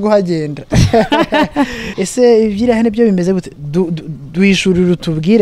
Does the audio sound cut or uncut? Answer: cut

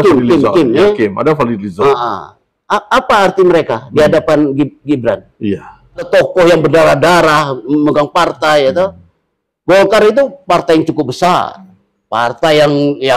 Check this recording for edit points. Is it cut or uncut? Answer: cut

